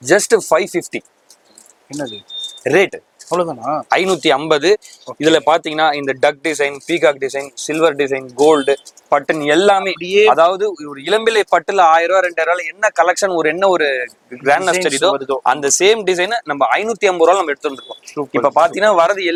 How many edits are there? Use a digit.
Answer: 0